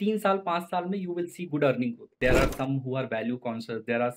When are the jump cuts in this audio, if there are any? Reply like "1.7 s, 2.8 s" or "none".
2.2 s